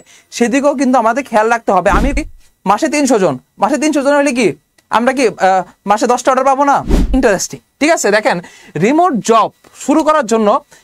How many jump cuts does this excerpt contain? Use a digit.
2